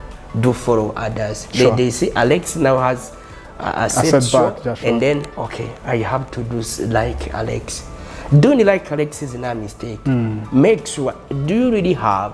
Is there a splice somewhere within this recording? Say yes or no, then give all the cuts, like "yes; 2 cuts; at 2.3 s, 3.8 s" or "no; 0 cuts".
no; 0 cuts